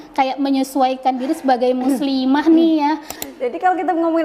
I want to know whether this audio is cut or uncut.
cut